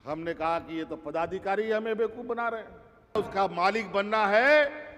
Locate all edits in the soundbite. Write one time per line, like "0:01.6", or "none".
0:03.2